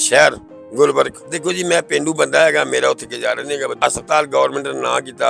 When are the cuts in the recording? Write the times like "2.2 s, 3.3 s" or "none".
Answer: 1.3 s, 3.8 s